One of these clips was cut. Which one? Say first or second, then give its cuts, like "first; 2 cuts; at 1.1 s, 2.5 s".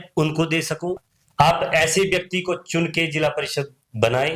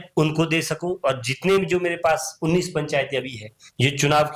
first; 1 cut; at 1.0 s